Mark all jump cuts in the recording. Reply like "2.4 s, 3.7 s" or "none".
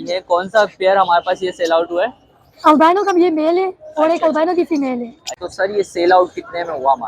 5.5 s